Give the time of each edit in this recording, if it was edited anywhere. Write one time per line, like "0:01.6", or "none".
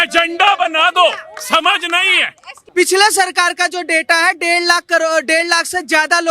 0:02.6